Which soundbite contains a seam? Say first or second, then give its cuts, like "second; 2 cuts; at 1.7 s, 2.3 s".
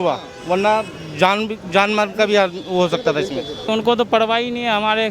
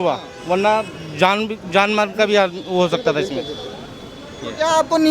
first; 1 cut; at 3.7 s